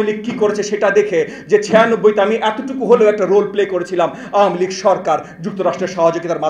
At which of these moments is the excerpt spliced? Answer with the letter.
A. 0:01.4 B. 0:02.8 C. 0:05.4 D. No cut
D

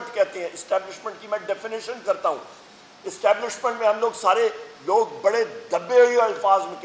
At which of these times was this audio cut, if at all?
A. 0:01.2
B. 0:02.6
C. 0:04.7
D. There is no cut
B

